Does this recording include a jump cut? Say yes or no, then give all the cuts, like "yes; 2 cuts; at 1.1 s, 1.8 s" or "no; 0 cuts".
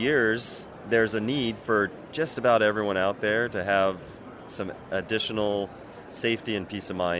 no; 0 cuts